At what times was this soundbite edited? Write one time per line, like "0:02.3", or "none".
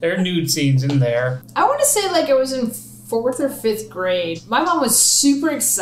0:01.4
0:04.4